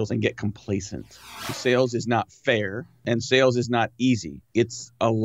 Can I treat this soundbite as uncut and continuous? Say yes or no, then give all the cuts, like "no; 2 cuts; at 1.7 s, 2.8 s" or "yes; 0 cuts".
no; 3 cuts; at 1.5 s, 3.0 s, 4.4 s